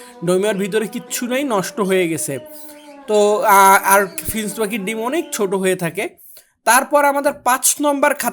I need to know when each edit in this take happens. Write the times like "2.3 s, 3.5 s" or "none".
none